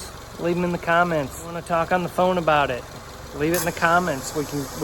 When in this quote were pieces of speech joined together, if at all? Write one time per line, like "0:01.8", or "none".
0:01.6

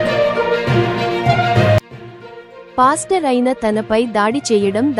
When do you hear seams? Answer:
0:01.9

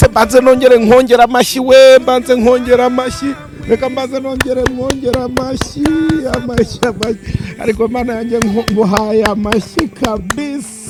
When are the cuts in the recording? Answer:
none

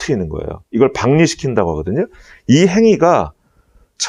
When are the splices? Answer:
none

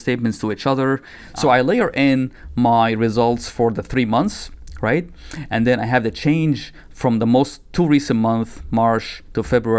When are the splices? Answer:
0:01.2

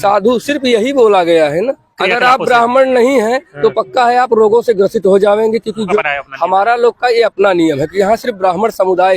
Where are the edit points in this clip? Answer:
0:01.9
0:06.0

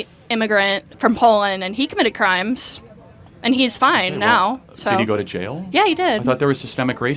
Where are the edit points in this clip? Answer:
none

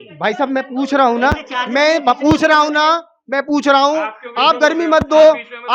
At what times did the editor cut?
none

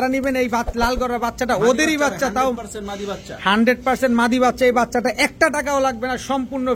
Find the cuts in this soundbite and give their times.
none

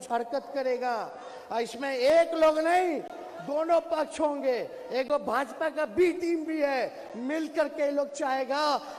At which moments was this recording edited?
none

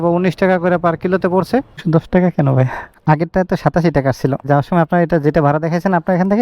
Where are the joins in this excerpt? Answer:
0:01.8
0:02.9
0:04.5

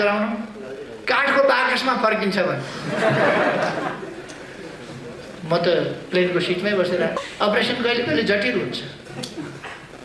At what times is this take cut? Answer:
0:07.2

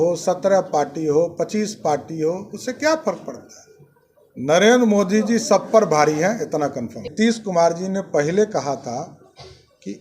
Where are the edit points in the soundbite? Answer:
0:07.1

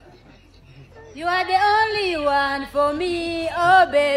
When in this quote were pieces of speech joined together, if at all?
none

